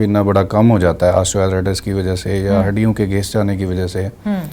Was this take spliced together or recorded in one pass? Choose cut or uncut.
uncut